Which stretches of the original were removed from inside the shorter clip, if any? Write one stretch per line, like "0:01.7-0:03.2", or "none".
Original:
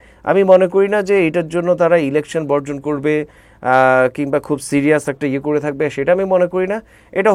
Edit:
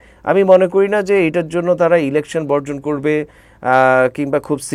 none